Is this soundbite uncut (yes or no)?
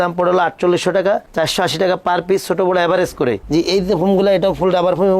no